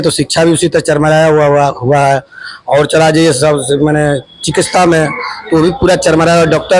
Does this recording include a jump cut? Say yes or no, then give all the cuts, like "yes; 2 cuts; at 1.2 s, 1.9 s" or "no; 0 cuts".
no; 0 cuts